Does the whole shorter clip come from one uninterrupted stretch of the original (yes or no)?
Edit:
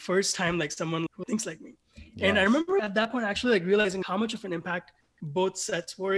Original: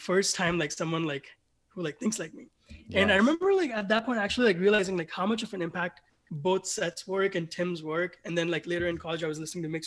no